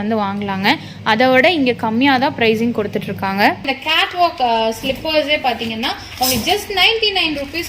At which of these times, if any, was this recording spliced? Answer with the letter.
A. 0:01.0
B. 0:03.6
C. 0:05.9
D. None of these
B